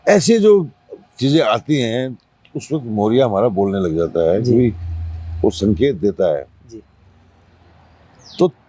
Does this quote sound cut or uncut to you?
uncut